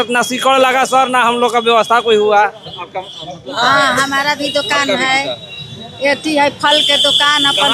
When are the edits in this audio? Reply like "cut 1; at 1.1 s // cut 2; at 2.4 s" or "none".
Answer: cut 1; at 3.5 s